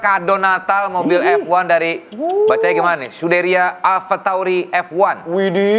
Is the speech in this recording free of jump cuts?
yes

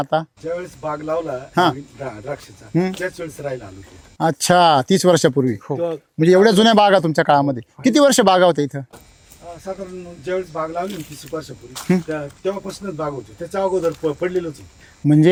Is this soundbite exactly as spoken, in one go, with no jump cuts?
yes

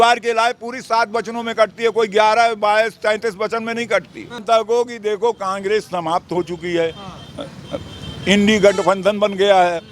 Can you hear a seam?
yes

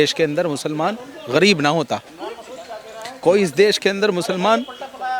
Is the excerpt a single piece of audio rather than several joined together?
yes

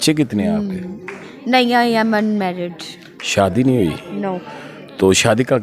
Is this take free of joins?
yes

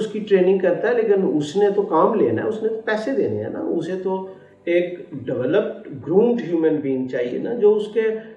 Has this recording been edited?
no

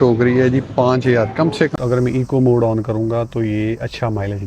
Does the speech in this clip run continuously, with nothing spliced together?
no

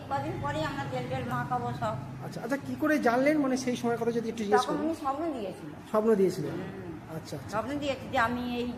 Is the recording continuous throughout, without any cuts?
yes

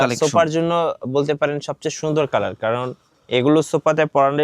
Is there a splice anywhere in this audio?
no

